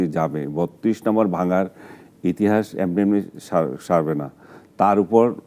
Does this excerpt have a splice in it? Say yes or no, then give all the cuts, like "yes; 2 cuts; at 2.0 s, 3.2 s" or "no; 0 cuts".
no; 0 cuts